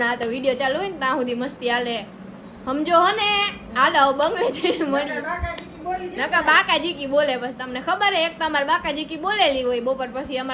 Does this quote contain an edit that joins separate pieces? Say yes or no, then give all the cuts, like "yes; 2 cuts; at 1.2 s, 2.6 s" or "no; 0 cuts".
no; 0 cuts